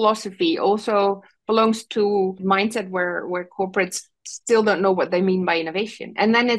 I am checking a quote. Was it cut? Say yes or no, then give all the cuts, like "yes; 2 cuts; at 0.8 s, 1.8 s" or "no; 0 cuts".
yes; 1 cut; at 2.4 s